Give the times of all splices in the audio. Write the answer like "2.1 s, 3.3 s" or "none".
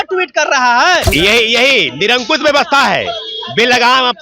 1.1 s